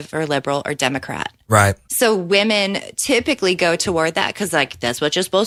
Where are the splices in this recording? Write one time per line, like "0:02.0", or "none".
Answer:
none